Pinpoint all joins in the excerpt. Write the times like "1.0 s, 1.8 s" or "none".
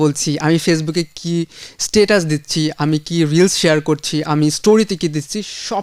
none